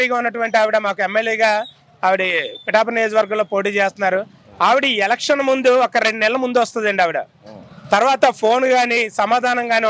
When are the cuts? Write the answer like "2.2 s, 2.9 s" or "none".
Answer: none